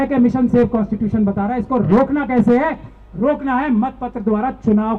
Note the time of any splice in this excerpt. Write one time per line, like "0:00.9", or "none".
none